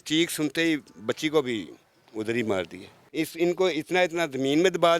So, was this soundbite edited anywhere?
yes; 1 cut; at 3.0 s

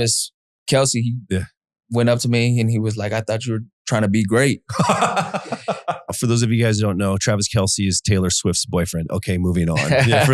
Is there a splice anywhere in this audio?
yes; 1 cut; at 6.1 s

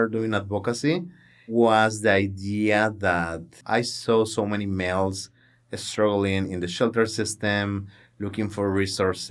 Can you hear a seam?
yes; 2 cuts; at 1.5 s, 3.5 s

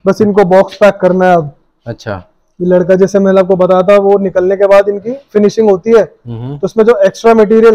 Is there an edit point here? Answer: no; 0 cuts

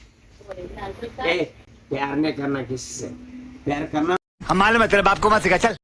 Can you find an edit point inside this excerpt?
no; 0 cuts

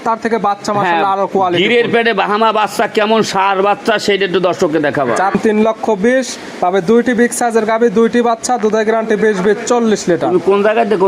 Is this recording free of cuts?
no; 1 cut; at 5.3 s

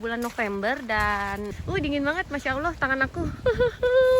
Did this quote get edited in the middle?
yes; 1 cut; at 1.6 s

